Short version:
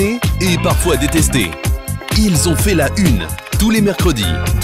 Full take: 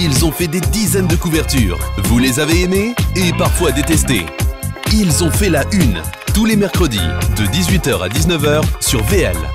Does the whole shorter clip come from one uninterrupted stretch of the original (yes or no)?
yes